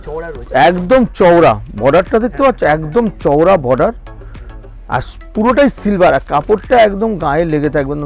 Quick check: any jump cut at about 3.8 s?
no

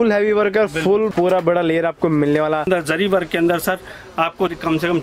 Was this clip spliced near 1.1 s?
yes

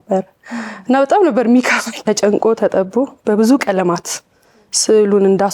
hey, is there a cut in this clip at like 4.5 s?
no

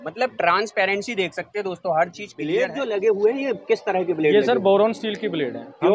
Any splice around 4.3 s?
no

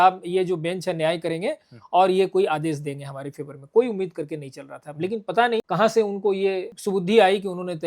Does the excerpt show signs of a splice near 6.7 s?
yes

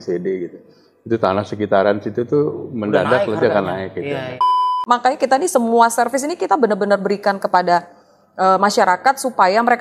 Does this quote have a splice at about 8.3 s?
no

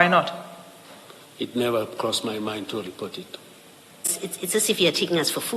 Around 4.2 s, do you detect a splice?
yes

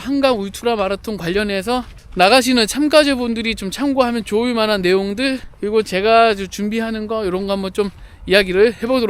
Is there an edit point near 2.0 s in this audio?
yes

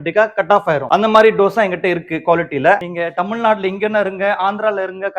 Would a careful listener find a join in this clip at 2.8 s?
yes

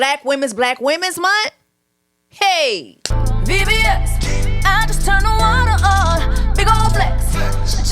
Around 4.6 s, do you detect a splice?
no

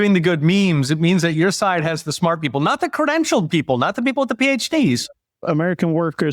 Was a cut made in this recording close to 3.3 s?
no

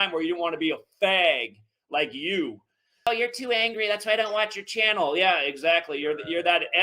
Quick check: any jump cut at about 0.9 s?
no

